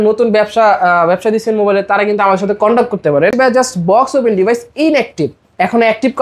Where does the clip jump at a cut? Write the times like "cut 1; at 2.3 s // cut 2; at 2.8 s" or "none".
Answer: cut 1; at 3.3 s